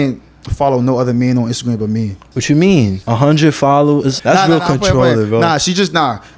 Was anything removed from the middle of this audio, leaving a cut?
yes; 3 cuts; at 2.2 s, 3.0 s, 4.2 s

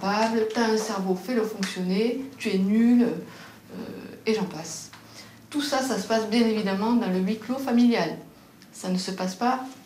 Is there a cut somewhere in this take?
no; 0 cuts

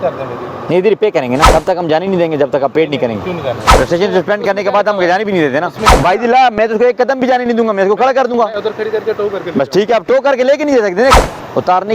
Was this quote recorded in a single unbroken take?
no; 4 cuts; at 1.5 s, 3.7 s, 5.9 s, 11.2 s

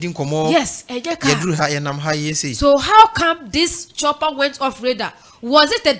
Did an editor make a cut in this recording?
no; 0 cuts

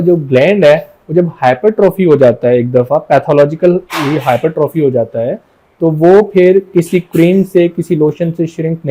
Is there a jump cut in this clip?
no; 0 cuts

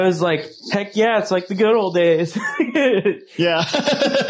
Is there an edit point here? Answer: no; 0 cuts

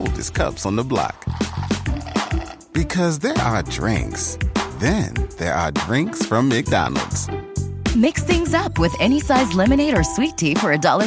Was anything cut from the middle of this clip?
no; 0 cuts

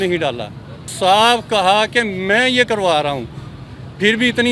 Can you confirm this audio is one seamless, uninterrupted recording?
no; 1 cut; at 0.9 s

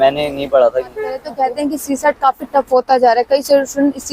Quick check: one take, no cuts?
no; 1 cut; at 1.3 s

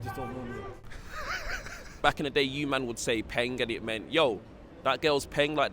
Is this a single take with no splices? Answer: no; 1 cut; at 1.9 s

